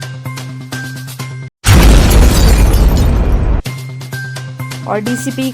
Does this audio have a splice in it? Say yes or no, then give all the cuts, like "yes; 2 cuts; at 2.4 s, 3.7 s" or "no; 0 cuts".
yes; 1 cut; at 1.2 s